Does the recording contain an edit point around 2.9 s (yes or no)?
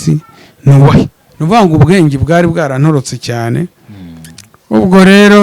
no